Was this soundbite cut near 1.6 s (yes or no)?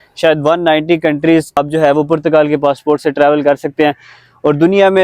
yes